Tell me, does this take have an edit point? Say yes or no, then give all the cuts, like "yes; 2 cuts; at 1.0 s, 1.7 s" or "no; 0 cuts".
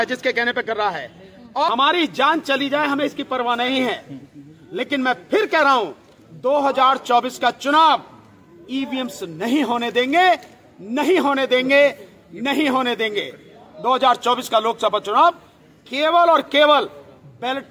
yes; 1 cut; at 1.7 s